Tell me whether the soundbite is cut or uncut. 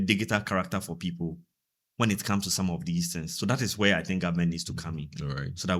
uncut